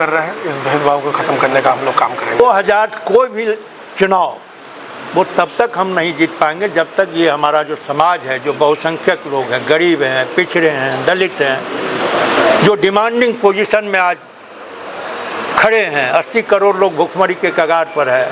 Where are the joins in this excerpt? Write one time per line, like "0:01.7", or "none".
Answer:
0:02.4

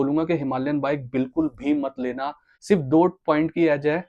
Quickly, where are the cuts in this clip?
0:02.5

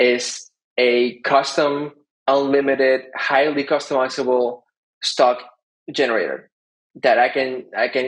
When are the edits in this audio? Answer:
none

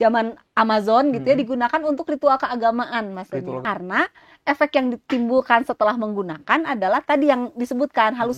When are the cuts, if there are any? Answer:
0:03.6

